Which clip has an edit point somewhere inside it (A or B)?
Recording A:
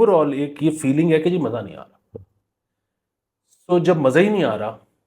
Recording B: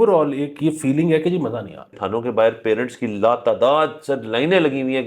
B